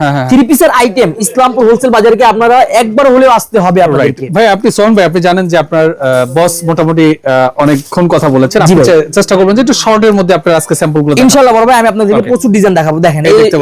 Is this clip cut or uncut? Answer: uncut